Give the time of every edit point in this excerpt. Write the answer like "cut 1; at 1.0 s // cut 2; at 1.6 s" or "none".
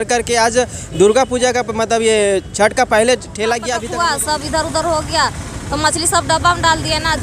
cut 1; at 3.9 s